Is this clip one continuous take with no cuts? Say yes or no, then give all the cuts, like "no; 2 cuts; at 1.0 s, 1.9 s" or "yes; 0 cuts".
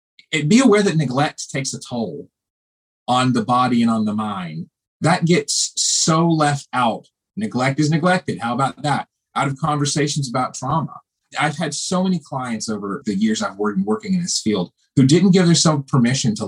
no; 2 cuts; at 11.3 s, 13.0 s